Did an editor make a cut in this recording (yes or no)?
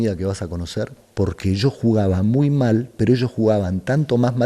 yes